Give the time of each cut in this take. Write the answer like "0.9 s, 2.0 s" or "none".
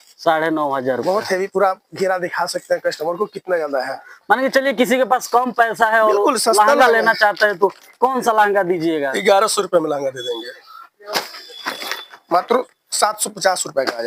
none